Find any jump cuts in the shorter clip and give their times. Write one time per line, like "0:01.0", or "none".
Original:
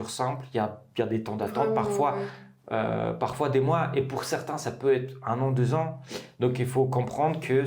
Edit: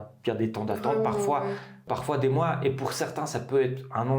0:01.8